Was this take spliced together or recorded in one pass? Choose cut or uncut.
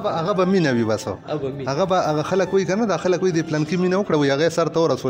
uncut